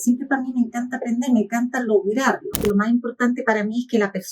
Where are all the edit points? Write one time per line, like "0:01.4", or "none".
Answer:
0:02.6